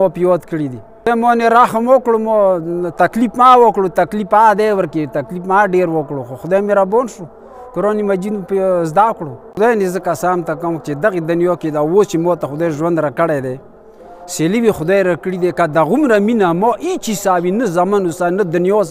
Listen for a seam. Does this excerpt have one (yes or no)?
yes